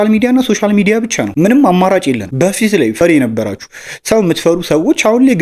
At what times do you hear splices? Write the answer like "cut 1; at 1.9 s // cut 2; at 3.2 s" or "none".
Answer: none